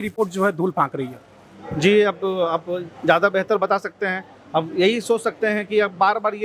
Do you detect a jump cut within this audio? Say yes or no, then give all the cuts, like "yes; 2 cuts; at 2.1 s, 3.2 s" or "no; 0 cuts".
no; 0 cuts